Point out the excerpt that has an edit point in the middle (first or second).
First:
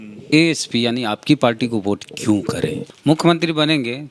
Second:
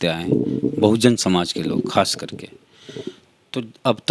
first